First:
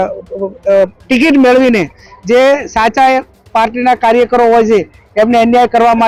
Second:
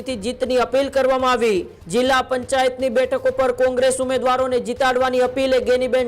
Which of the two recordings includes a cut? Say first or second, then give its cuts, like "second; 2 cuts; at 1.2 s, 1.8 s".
second; 1 cut; at 1.8 s